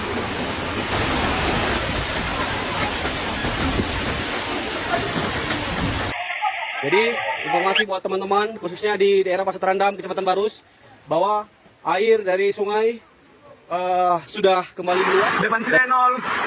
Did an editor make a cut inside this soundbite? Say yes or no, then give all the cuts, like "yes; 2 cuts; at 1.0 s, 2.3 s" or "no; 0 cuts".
yes; 1 cut; at 6.1 s